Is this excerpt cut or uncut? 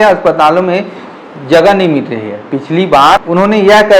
uncut